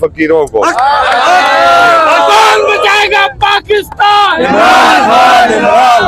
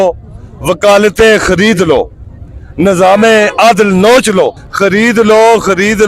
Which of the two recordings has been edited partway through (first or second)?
second